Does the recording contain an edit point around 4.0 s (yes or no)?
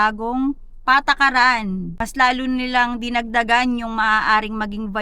no